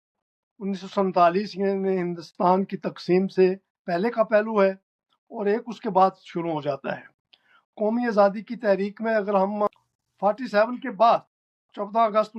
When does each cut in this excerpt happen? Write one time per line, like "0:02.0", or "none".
0:09.7